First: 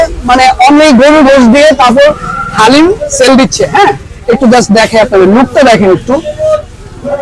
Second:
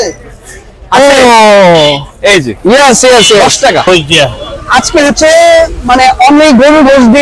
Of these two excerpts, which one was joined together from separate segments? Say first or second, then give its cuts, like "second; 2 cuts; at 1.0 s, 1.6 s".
second; 1 cut; at 3.9 s